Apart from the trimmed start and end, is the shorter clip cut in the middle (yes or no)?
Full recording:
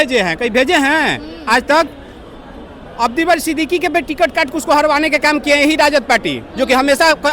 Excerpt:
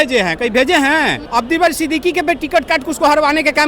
yes